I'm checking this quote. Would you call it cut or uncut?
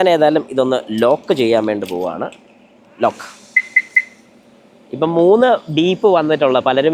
uncut